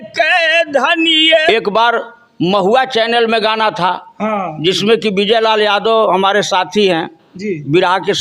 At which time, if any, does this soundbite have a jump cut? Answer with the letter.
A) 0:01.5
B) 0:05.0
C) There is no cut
A